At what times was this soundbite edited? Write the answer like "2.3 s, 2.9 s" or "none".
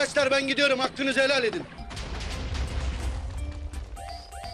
none